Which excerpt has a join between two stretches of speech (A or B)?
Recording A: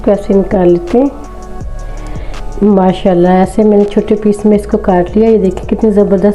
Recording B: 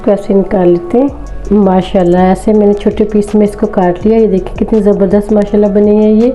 B